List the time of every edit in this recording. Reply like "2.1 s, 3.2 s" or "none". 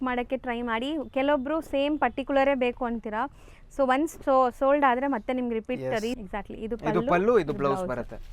6.2 s